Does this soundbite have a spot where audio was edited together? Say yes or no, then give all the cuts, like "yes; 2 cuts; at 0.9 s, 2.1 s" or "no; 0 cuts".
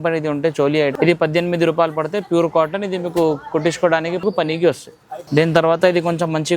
no; 0 cuts